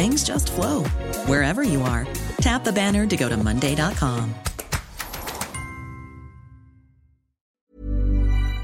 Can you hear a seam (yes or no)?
yes